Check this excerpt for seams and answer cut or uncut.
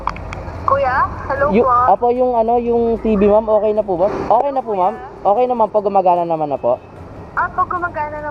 uncut